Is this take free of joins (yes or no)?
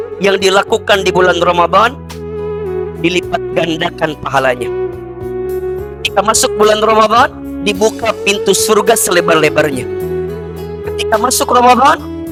yes